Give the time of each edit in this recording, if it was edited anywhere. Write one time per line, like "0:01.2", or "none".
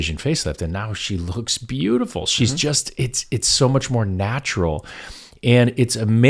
none